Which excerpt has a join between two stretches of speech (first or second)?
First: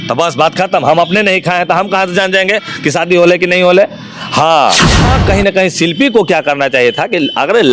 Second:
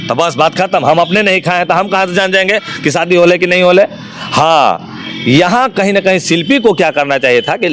first